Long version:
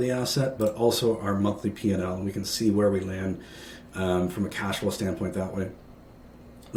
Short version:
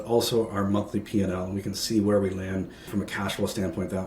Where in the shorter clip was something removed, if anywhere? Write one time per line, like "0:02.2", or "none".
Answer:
0:03.1